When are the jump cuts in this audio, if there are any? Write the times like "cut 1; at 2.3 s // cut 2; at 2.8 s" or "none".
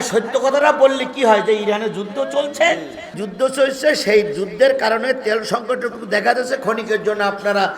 cut 1; at 3.2 s